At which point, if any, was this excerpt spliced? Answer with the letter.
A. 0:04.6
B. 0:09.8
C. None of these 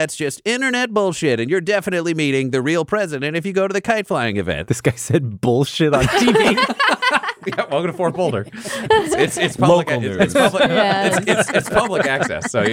A